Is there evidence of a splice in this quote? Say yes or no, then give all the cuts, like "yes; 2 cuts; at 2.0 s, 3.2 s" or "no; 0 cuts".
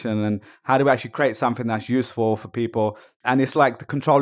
yes; 1 cut; at 3.1 s